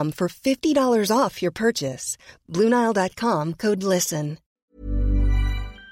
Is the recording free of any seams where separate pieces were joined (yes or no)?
no